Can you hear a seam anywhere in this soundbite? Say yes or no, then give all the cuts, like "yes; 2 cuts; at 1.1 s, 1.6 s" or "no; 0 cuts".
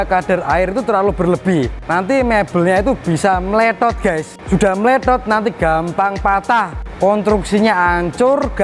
yes; 3 cuts; at 1.8 s, 4.3 s, 6.8 s